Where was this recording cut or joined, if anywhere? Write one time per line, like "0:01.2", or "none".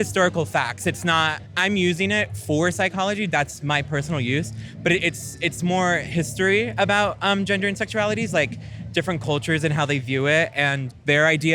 0:01.4